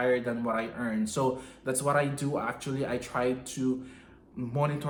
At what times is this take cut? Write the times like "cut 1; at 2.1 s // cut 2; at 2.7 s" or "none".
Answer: none